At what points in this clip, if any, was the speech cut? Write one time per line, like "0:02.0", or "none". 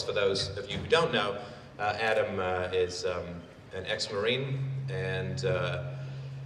0:02.9